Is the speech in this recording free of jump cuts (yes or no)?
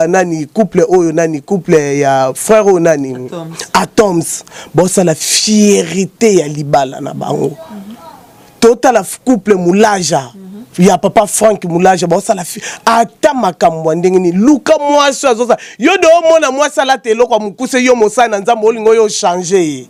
yes